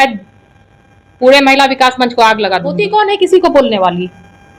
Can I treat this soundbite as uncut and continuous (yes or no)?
no